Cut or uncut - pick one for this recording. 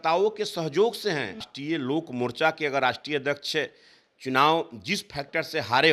cut